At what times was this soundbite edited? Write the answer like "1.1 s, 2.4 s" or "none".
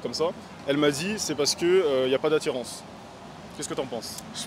none